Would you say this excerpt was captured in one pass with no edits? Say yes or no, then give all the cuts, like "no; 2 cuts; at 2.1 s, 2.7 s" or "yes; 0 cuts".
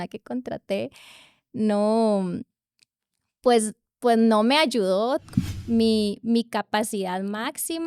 no; 1 cut; at 5.2 s